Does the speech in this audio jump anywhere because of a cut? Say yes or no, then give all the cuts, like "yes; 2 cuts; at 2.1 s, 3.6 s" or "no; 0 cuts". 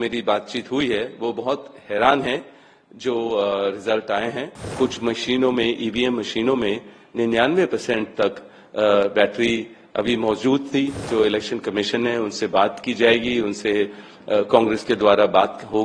yes; 2 cuts; at 4.6 s, 11.0 s